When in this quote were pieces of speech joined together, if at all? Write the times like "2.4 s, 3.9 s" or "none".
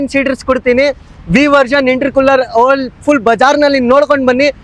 none